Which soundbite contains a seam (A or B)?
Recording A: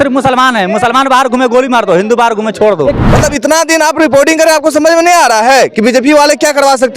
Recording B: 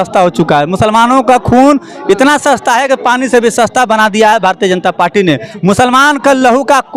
A